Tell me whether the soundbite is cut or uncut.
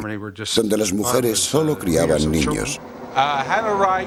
uncut